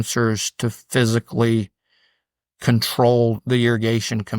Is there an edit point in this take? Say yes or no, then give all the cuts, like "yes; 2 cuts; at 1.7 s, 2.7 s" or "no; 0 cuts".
yes; 1 cut; at 3.4 s